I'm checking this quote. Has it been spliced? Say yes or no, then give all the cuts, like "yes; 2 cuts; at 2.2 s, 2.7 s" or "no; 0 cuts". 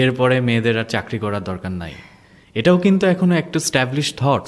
no; 0 cuts